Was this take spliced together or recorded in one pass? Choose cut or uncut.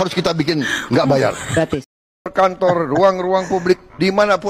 cut